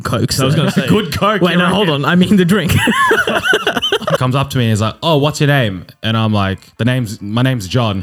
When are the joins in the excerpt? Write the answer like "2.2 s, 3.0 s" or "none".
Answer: 4.2 s, 6.7 s